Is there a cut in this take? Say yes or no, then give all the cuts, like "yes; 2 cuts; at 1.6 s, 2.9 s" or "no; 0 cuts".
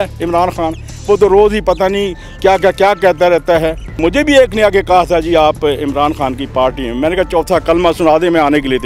yes; 1 cut; at 4.0 s